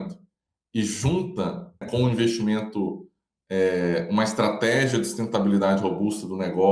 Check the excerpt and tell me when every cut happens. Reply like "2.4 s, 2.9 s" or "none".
1.9 s